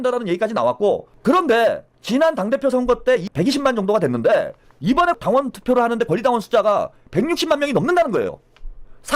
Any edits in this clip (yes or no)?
yes